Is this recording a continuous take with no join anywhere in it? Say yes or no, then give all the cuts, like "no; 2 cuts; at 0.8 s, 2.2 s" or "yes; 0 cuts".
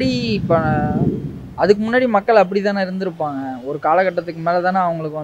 yes; 0 cuts